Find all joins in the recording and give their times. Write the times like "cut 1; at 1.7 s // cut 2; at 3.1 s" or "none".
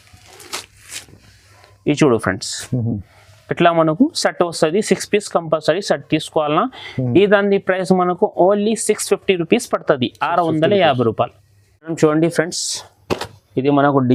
none